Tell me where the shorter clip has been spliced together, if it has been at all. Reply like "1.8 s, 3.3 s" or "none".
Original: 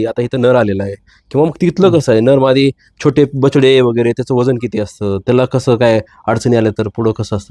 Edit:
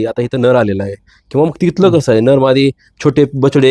none